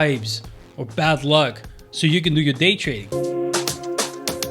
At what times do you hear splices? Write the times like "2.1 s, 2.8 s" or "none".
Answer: 3.0 s